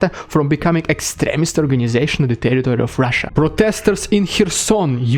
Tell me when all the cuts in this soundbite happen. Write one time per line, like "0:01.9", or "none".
0:03.2